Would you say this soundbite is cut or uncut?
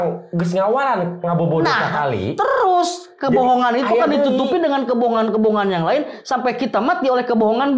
uncut